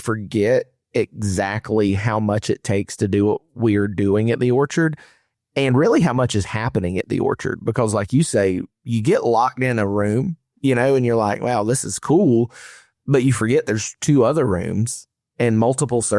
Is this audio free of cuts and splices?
yes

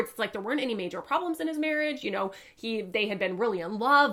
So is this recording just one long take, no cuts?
yes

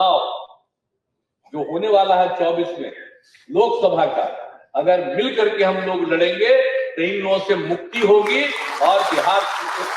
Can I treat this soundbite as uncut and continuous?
yes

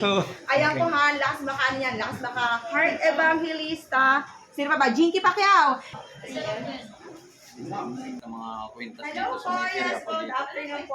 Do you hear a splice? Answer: yes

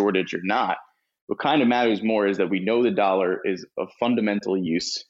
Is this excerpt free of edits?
yes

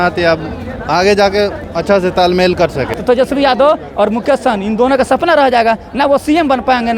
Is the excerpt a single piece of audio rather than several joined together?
no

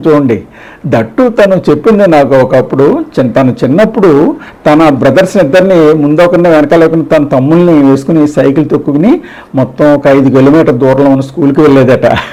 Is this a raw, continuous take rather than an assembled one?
yes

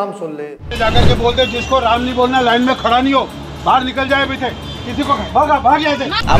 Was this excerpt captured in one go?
yes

